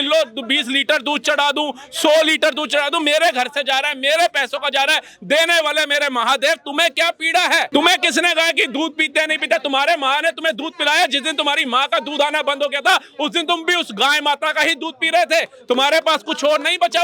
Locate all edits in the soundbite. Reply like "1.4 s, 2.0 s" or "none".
7.7 s